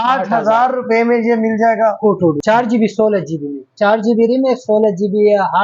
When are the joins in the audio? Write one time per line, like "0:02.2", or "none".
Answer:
0:02.4